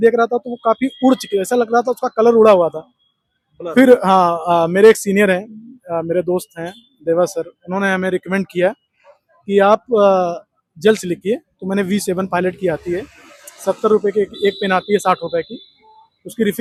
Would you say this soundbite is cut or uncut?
uncut